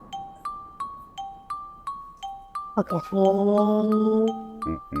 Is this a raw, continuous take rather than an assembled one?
no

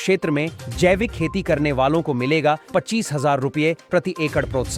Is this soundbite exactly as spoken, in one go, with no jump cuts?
yes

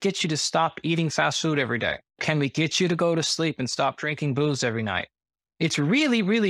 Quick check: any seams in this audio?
yes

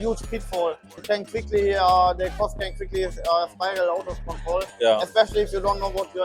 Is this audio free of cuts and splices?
no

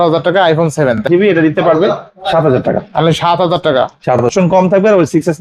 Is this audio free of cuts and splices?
no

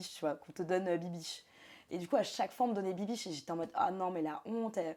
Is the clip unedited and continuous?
yes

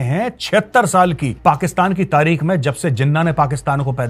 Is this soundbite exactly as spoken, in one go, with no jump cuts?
no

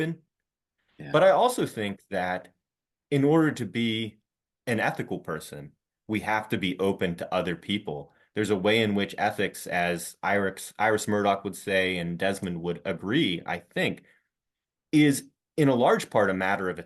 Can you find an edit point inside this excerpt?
no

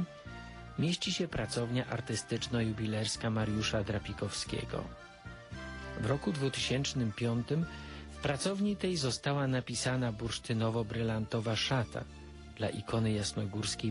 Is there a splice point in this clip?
yes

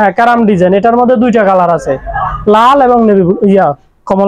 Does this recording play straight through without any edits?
yes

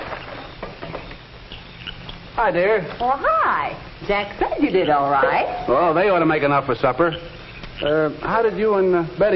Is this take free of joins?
yes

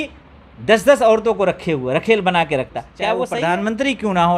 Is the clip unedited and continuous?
no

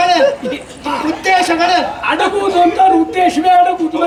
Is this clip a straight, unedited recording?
yes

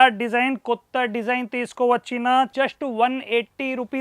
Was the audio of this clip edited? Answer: yes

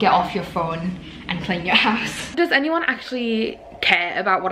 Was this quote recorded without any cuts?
no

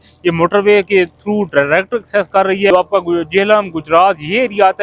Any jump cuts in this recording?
yes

